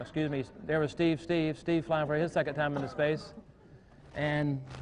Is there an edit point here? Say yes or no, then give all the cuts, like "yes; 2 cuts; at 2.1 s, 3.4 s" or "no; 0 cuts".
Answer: no; 0 cuts